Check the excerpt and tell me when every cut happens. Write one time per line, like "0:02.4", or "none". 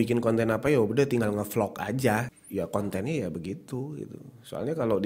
0:02.3